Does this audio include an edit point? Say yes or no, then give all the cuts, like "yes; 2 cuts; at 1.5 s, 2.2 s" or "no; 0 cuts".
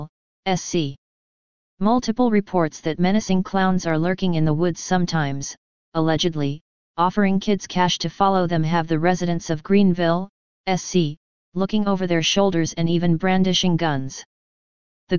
yes; 1 cut; at 14.3 s